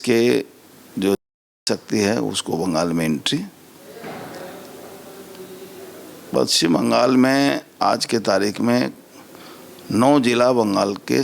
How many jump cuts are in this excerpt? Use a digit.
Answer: 0